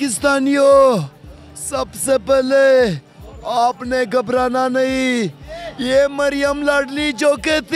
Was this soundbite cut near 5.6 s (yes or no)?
no